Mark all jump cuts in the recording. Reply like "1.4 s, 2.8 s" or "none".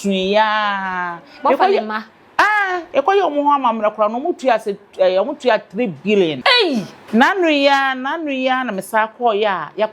6.4 s